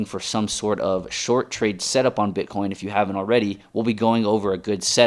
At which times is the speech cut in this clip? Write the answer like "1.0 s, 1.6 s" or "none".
3.6 s